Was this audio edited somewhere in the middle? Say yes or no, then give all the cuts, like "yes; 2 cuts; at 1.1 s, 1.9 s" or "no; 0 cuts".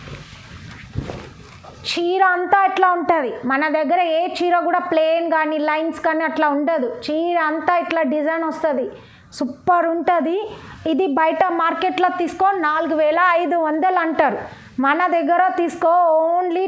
no; 0 cuts